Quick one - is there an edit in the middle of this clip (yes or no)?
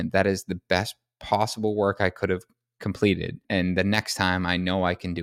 yes